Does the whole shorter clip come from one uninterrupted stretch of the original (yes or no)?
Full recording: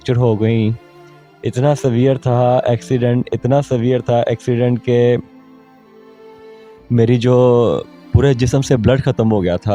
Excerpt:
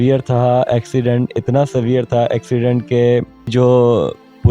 no